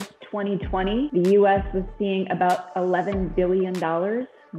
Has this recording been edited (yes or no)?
yes